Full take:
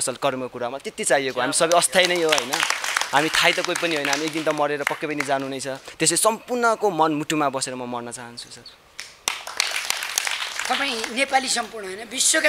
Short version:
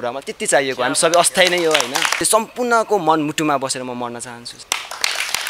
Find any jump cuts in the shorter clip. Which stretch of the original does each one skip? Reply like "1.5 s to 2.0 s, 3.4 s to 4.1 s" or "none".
2.8 s to 6.1 s, 8.4 s to 9.1 s